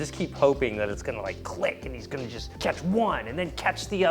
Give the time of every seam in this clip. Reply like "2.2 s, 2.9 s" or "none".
2.4 s